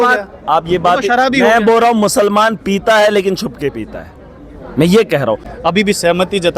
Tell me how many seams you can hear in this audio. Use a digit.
1